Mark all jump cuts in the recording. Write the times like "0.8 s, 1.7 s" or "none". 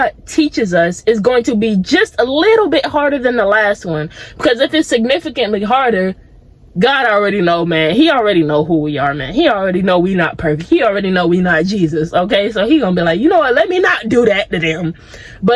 none